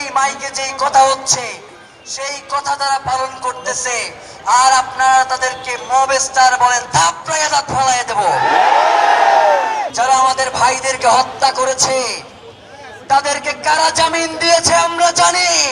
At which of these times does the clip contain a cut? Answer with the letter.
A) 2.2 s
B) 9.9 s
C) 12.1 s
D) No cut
B